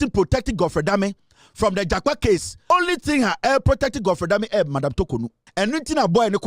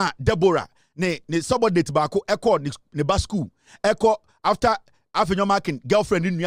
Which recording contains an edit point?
first; 2 cuts; at 2.7 s, 5.4 s

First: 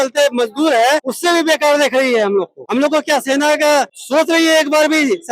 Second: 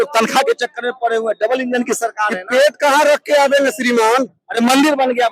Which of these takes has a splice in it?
first; 3 cuts; at 1.1 s, 2.6 s, 4.0 s

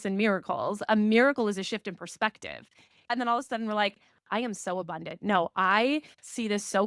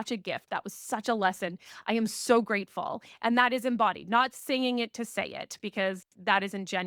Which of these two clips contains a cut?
first; 1 cut; at 3.1 s

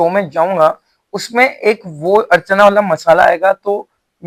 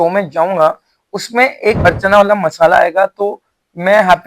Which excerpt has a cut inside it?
second; 1 cut; at 1.8 s

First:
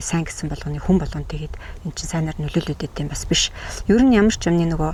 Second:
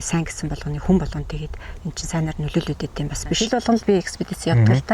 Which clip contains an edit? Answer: second; 1 cut; at 3.4 s

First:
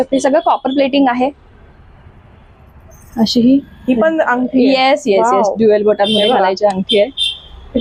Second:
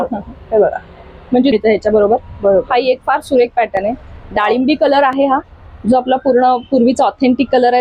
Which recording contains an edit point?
second; 1 cut; at 1.5 s

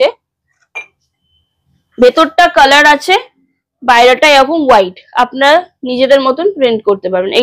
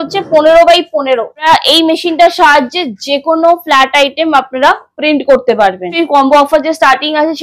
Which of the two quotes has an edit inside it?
second; 2 cuts; at 1.5 s, 5.9 s

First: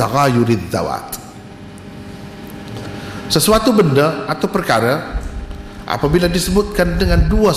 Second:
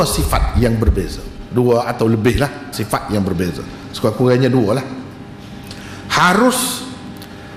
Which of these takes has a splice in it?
second; 1 cut; at 2.8 s

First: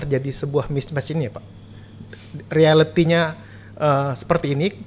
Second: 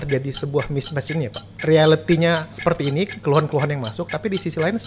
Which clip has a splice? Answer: second; 2 cuts; at 1.5 s, 2.5 s

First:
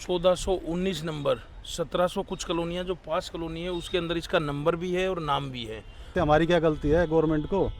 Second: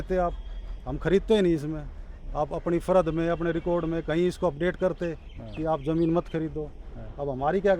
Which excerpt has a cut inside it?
first; 1 cut; at 6.1 s

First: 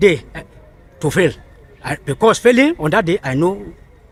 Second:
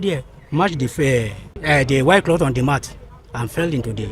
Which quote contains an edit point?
second; 1 cut; at 1.5 s

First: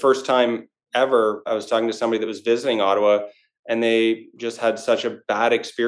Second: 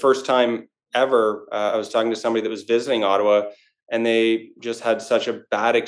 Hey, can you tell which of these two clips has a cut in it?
first; 1 cut; at 1.5 s

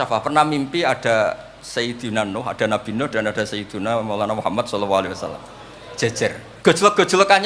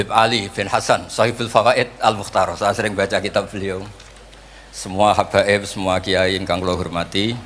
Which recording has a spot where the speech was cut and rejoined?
first; 1 cut; at 6.5 s

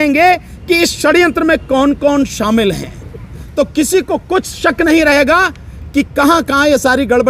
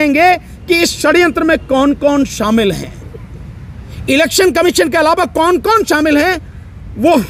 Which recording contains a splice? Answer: first; 1 cut; at 3.4 s

